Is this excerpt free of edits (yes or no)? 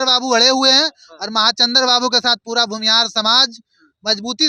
yes